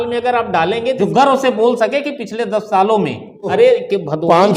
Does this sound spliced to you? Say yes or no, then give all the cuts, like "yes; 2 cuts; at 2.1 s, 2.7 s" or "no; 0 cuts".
yes; 2 cuts; at 1.0 s, 3.5 s